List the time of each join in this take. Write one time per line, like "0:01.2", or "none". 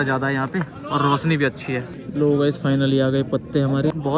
0:01.9